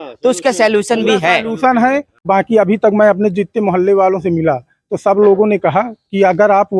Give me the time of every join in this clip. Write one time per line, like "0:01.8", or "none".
0:02.2

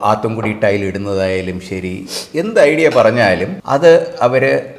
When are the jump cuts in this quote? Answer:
0:03.5

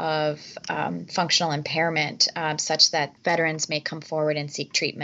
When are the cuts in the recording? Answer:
0:03.2

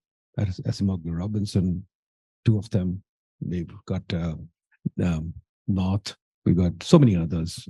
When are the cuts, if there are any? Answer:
none

